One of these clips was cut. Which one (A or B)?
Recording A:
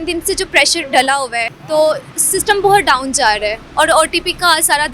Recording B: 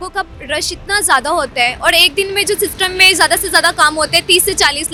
A